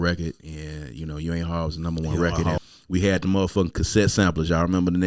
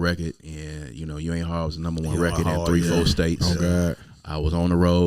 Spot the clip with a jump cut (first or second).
first